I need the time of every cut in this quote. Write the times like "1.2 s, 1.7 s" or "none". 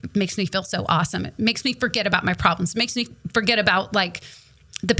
none